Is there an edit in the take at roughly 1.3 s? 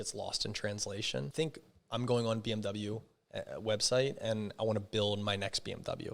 yes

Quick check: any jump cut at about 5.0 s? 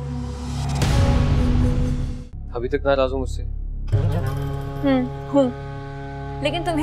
no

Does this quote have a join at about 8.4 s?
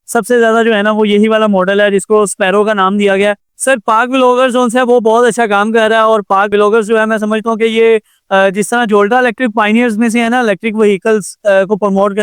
no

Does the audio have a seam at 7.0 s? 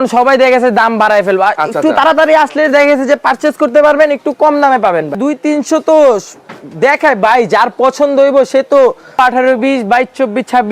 no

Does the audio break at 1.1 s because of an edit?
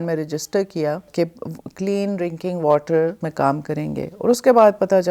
yes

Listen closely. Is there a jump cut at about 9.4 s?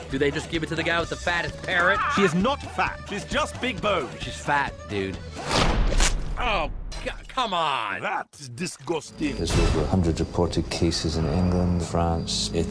yes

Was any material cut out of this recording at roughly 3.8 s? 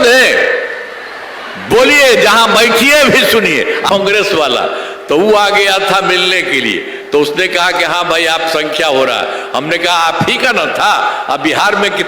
yes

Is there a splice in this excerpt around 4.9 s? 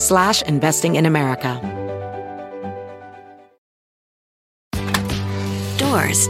no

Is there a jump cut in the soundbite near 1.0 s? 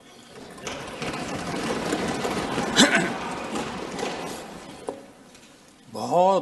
no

